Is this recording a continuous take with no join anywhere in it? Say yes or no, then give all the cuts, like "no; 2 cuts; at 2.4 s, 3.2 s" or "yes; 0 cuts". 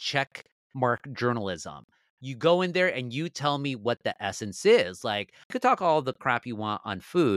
no; 1 cut; at 5.5 s